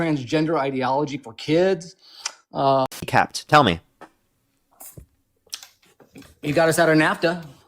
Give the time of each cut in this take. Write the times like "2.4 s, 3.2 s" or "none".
3.0 s